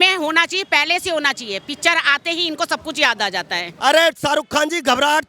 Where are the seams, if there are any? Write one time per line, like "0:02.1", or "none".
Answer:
0:03.6